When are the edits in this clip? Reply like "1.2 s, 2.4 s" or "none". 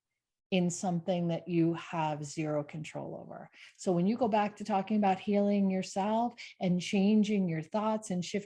none